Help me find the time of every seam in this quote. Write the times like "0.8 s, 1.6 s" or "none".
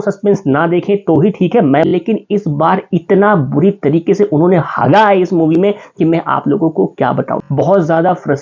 1.9 s, 7.4 s